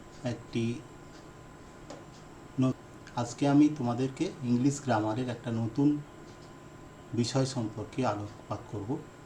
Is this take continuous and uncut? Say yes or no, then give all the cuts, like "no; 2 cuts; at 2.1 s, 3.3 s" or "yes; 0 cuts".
no; 1 cut; at 2.8 s